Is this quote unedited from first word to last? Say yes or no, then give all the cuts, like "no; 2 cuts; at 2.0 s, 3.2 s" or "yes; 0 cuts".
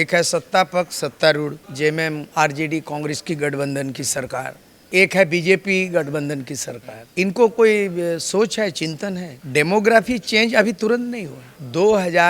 yes; 0 cuts